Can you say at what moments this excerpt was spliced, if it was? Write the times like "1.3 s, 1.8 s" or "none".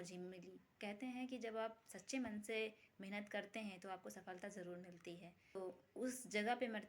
5.6 s